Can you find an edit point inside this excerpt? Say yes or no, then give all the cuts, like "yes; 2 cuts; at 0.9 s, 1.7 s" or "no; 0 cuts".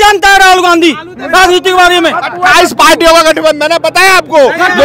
no; 0 cuts